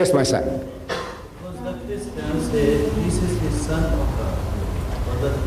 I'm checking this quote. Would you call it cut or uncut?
cut